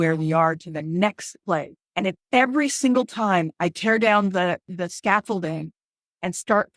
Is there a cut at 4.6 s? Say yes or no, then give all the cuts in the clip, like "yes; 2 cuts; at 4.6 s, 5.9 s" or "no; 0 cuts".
no; 1 cut; at 1.8 s